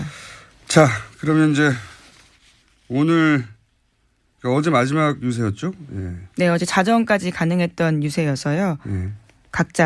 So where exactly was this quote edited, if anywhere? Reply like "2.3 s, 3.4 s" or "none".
none